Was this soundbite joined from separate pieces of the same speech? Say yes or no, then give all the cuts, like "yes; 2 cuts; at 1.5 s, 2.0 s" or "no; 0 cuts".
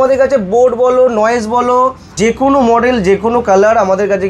yes; 1 cut; at 2.2 s